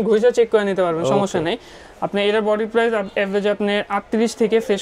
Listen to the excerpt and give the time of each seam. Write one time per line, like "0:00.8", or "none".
none